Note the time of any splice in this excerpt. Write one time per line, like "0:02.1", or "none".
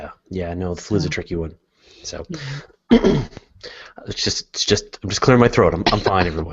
0:02.3